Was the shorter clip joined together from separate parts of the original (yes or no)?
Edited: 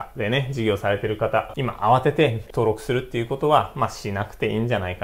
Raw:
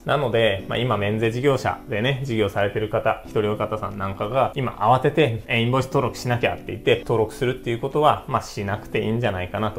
yes